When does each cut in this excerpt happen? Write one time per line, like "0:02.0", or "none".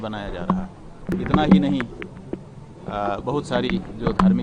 0:01.0